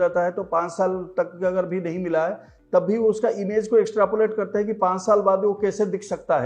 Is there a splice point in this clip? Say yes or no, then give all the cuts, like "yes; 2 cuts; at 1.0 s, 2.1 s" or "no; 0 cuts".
no; 0 cuts